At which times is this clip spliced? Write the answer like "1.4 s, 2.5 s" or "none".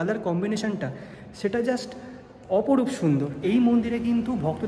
3.3 s